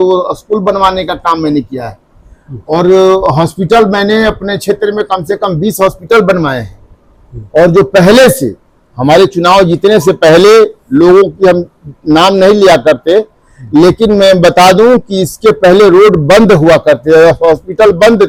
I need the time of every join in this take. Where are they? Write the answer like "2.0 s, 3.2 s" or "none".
none